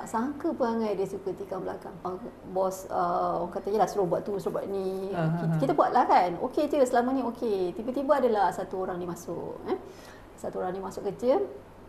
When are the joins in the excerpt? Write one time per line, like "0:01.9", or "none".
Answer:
0:02.1